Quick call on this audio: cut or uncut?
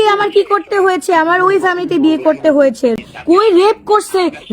cut